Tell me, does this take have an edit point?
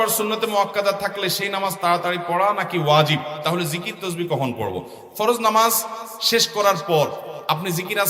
no; 0 cuts

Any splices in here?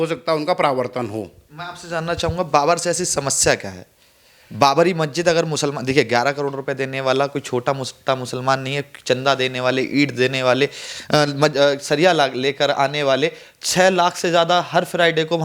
no; 0 cuts

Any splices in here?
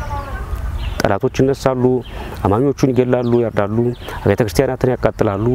no; 0 cuts

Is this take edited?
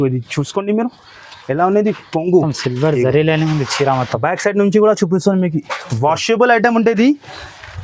no; 0 cuts

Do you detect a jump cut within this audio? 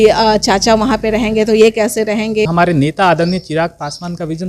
yes; 1 cut; at 2.5 s

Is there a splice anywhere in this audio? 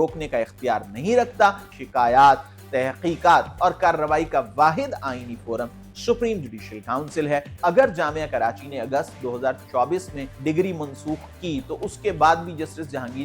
yes; 3 cuts; at 1.7 s, 7.5 s, 10.2 s

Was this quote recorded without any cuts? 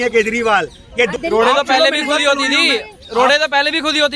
no; 1 cut; at 1.1 s

